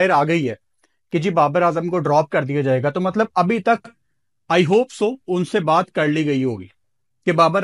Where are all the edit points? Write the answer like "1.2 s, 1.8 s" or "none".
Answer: none